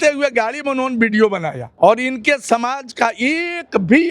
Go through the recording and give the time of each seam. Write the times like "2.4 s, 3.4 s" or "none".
1.6 s